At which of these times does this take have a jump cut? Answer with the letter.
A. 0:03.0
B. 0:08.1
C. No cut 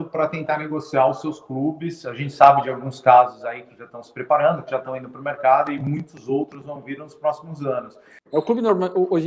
B